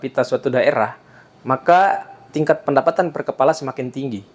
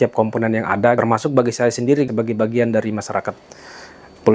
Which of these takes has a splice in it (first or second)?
second